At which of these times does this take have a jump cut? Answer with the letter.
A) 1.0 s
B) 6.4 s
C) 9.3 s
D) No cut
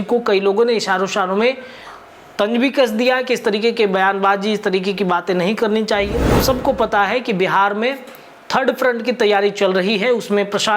B